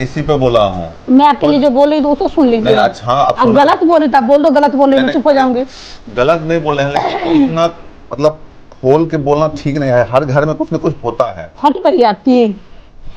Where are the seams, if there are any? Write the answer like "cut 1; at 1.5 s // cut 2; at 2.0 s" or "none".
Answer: none

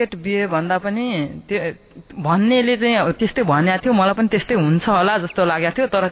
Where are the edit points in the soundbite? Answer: none

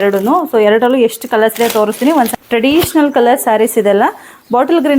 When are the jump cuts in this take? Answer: cut 1; at 2.3 s

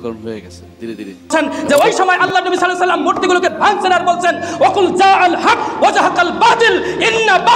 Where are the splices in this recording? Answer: cut 1; at 1.3 s

